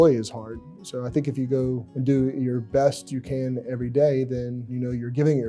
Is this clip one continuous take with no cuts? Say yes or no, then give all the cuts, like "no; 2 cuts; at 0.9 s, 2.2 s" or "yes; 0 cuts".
no; 2 cuts; at 1.9 s, 4.6 s